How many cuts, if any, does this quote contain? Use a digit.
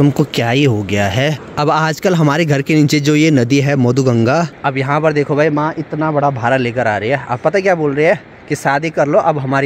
2